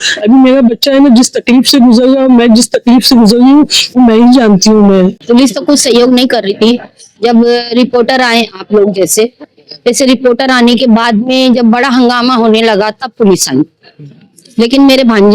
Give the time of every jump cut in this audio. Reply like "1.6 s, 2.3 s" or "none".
5.2 s